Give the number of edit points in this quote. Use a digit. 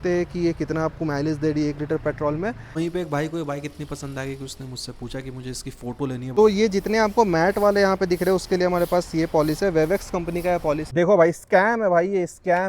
3